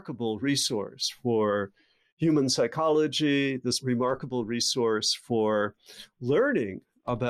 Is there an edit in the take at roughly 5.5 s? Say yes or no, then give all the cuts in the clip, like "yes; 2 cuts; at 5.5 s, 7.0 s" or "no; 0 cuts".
no; 1 cut; at 3.8 s